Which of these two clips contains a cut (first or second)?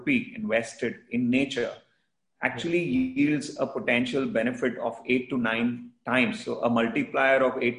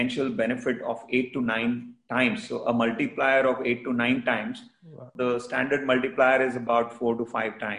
second